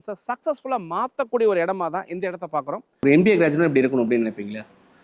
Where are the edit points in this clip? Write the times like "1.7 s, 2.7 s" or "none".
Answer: 2.9 s